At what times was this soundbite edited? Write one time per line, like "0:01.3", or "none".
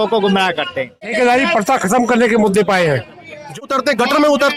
0:01.1
0:03.6